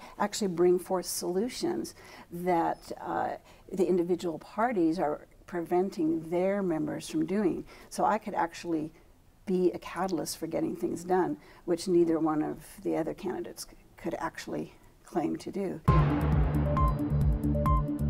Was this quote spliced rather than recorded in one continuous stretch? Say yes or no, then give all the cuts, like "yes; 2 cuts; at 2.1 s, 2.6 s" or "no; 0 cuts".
yes; 1 cut; at 16.0 s